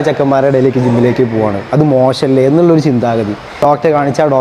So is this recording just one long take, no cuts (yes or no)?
no